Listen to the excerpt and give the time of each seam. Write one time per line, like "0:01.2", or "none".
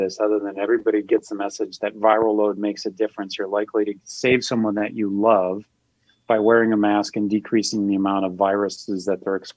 none